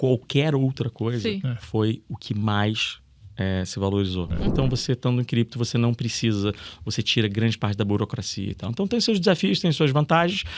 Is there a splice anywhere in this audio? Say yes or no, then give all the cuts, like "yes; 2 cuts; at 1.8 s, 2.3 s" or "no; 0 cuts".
yes; 1 cut; at 4.5 s